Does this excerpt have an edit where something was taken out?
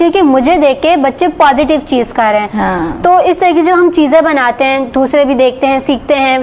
no; 0 cuts

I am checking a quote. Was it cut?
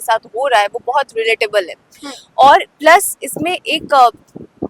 no; 0 cuts

